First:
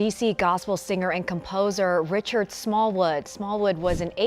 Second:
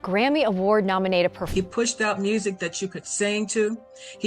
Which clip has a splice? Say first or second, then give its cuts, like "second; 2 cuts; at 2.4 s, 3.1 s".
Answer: second; 1 cut; at 1.4 s